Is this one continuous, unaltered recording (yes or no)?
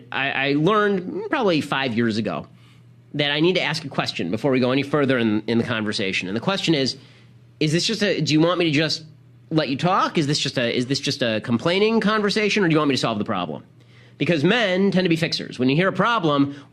no